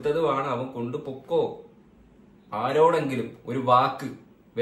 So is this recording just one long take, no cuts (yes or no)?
no